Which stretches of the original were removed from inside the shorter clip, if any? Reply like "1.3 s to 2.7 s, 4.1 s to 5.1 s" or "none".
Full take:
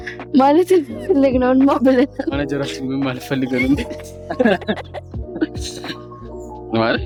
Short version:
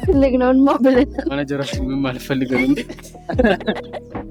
none